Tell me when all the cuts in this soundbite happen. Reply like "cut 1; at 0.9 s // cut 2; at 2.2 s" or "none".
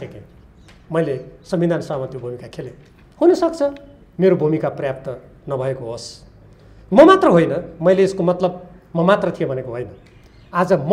none